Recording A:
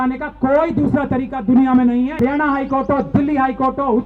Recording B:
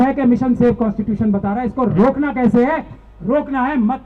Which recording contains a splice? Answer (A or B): A